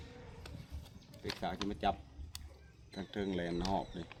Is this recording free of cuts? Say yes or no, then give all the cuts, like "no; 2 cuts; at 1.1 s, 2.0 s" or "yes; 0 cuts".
yes; 0 cuts